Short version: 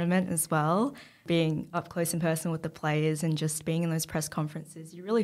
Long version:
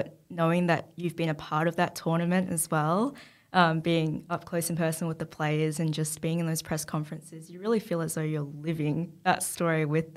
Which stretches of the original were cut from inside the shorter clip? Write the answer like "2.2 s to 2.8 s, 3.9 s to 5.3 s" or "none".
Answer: 3.4 s to 3.8 s